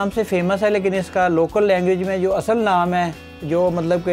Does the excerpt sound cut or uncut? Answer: uncut